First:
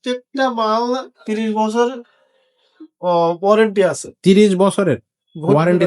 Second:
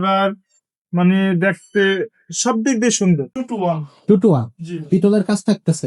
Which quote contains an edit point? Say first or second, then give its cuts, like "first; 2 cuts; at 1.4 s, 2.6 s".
second; 1 cut; at 3.3 s